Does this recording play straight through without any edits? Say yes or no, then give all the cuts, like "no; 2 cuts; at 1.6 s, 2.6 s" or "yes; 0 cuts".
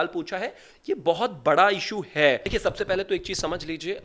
no; 1 cut; at 2.5 s